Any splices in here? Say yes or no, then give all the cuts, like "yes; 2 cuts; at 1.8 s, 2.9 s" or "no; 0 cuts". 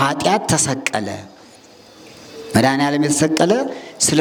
no; 0 cuts